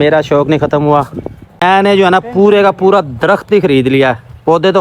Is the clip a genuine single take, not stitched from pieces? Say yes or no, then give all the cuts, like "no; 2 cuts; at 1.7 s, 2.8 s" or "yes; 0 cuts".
no; 1 cut; at 1.6 s